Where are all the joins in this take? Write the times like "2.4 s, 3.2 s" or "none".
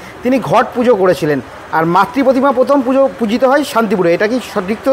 none